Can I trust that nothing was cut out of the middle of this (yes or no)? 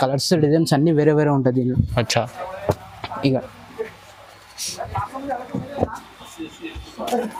yes